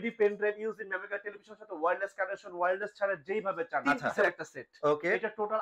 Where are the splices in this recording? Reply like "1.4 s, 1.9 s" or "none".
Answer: 3.8 s